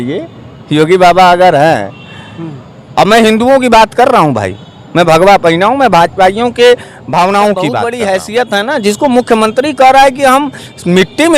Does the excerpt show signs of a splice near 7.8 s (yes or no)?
yes